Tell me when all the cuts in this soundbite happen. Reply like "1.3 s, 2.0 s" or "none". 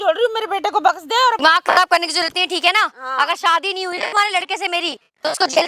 1.4 s